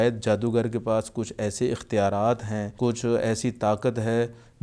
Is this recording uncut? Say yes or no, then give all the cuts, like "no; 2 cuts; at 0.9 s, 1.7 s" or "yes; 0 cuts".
no; 1 cut; at 2.6 s